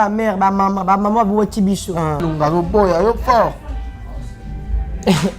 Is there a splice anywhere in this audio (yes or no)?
yes